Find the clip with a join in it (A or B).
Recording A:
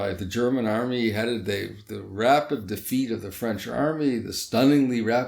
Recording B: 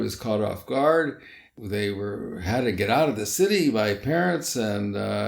B